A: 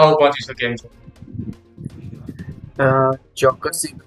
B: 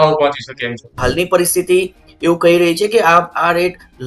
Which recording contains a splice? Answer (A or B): B